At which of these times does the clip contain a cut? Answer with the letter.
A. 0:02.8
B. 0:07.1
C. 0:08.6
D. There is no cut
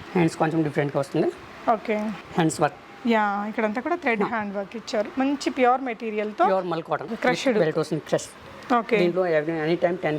B